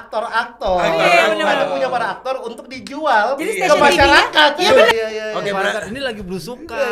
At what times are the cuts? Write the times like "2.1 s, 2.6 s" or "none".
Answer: 4.9 s